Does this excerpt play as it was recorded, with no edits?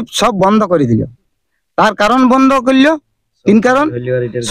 yes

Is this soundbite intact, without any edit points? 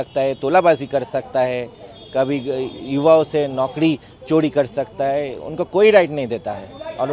yes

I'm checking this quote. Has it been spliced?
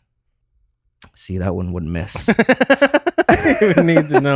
no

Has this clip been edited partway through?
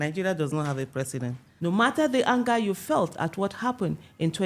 yes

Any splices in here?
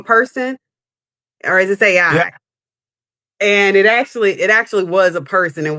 no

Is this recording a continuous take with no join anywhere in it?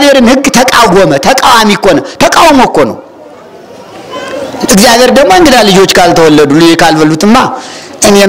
yes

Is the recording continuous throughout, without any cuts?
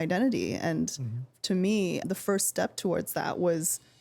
no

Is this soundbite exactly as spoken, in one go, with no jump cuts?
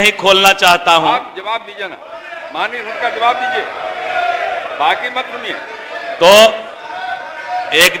yes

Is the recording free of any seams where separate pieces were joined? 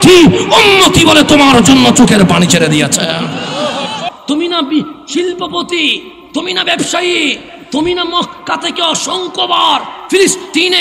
no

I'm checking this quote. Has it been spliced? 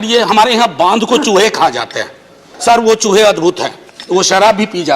yes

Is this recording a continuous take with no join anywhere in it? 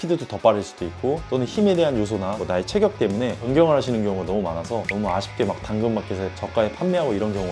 yes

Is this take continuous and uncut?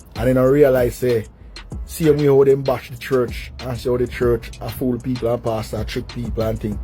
yes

